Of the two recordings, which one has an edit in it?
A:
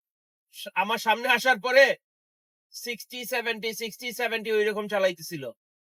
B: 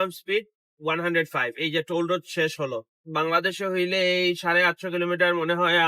B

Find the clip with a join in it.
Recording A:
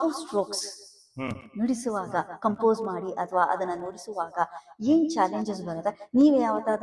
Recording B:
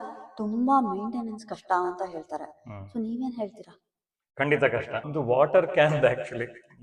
B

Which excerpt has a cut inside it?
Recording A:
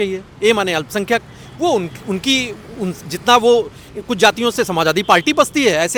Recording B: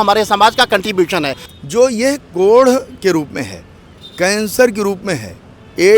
B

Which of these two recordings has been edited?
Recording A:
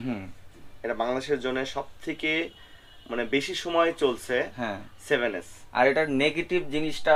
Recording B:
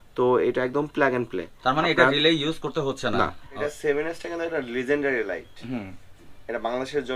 B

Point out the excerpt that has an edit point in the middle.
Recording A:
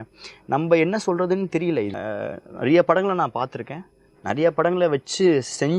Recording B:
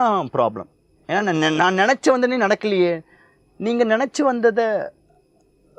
A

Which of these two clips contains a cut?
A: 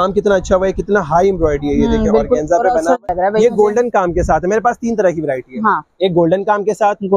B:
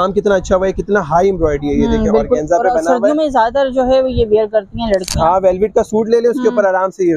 A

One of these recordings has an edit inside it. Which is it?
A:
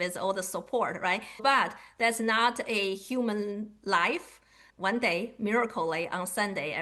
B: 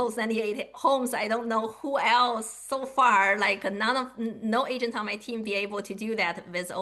A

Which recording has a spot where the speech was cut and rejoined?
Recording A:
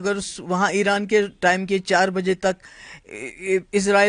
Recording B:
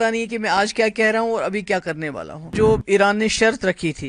B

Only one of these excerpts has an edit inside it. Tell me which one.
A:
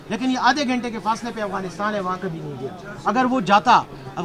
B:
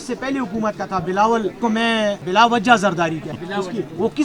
B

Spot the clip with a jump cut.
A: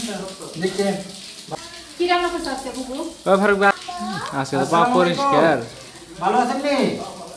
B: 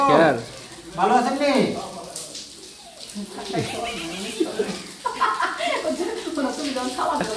A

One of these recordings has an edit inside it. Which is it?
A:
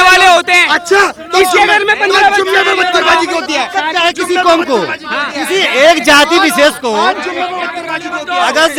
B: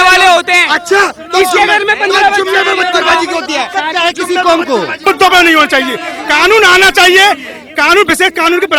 B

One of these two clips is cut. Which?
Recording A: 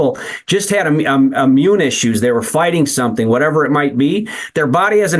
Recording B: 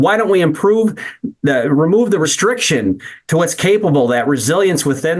B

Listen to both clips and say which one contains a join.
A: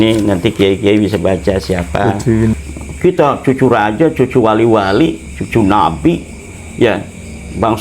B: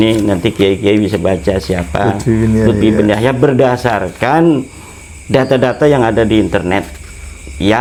A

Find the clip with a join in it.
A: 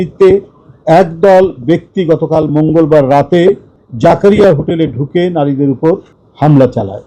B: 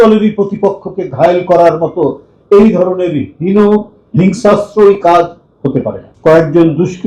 B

